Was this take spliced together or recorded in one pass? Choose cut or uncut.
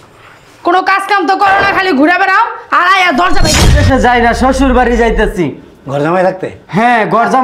cut